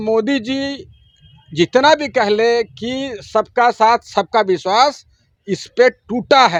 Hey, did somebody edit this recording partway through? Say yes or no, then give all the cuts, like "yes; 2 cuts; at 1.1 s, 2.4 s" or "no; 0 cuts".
no; 0 cuts